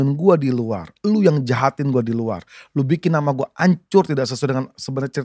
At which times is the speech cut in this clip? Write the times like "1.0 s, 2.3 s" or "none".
none